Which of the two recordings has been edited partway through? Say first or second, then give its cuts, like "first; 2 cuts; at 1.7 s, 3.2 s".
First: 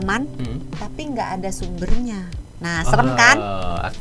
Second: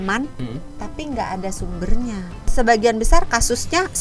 second; 1 cut; at 2.4 s